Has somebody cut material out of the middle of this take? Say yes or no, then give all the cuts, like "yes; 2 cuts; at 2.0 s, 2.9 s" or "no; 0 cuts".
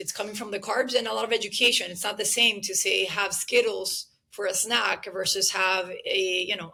no; 0 cuts